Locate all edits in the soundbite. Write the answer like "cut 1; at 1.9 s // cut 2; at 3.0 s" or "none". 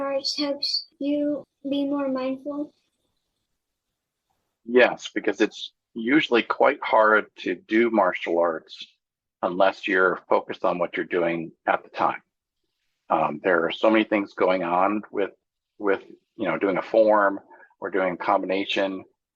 cut 1; at 1.3 s